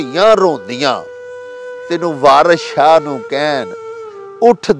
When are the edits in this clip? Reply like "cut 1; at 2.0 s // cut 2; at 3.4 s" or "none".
none